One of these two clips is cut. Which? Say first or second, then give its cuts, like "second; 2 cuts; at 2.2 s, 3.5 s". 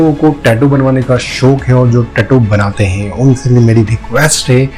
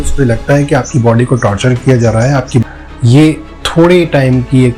second; 1 cut; at 2.6 s